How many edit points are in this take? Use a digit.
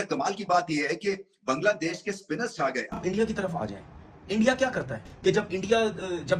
2